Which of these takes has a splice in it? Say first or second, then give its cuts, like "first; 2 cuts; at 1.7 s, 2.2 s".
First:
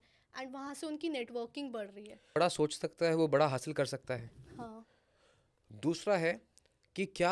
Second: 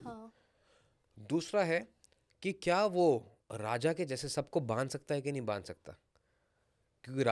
first; 1 cut; at 2.4 s